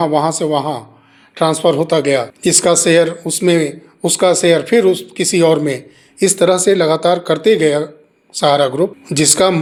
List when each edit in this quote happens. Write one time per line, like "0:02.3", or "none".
none